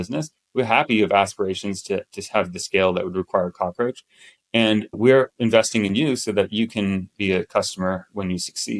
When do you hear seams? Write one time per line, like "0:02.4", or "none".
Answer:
none